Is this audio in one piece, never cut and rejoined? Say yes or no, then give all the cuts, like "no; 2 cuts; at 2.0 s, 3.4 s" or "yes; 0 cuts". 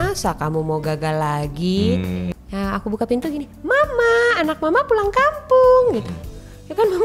no; 1 cut; at 2.3 s